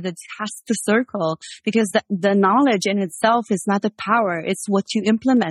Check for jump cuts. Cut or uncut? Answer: uncut